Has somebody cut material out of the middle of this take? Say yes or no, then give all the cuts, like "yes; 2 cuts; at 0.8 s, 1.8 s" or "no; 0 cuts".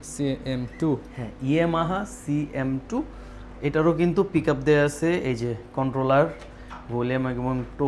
no; 0 cuts